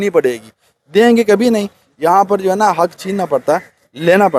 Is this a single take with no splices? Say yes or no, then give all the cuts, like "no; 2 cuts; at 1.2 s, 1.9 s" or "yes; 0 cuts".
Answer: yes; 0 cuts